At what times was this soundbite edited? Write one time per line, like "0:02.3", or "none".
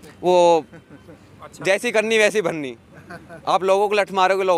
none